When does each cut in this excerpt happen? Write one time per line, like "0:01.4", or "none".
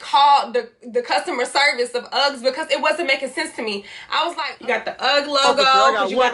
0:04.5

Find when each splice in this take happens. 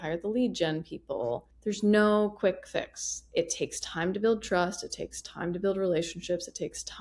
0:01.5

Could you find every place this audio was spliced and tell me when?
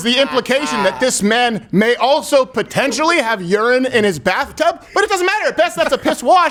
none

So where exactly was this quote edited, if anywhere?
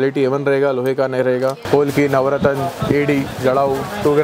0:01.6

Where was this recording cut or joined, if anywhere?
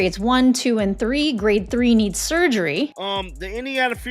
0:03.0

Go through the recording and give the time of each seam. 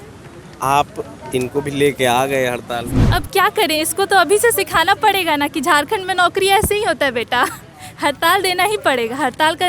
0:03.0

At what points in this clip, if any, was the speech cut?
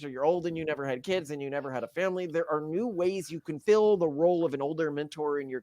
0:03.6

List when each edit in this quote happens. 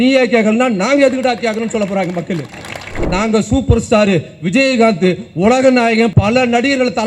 0:03.0
0:06.1

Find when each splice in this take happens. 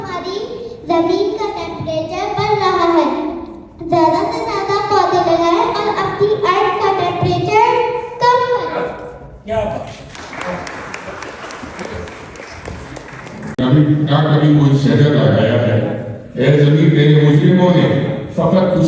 0:13.5

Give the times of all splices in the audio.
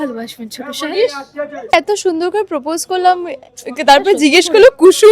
0:01.7

